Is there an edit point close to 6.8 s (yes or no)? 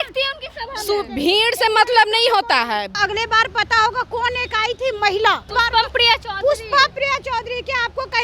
no